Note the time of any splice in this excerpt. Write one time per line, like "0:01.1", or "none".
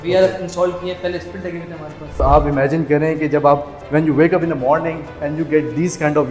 0:02.2